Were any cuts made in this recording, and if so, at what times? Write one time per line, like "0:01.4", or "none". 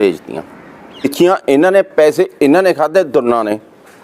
0:01.0